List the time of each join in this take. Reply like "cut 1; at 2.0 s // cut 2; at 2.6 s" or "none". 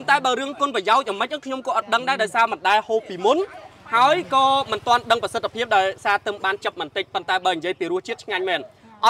none